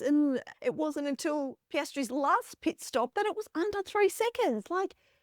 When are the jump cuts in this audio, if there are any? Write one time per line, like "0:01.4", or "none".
0:02.1

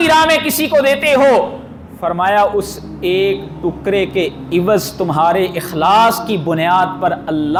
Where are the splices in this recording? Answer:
none

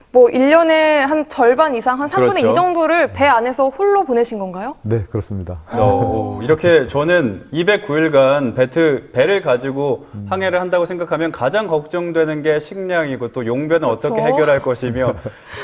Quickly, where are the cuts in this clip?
none

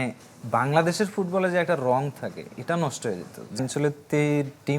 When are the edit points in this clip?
0:03.6

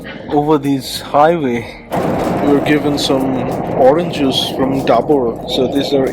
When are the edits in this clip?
0:01.8

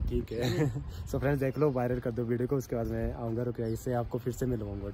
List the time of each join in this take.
none

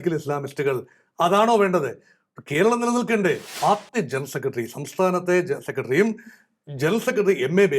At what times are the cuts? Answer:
0:03.5

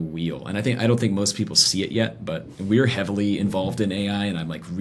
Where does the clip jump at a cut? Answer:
0:02.5

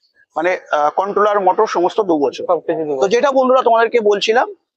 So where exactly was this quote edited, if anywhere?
none

